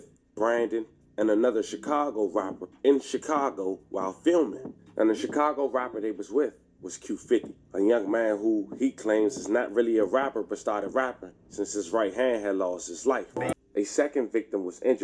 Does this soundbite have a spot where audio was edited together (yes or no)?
yes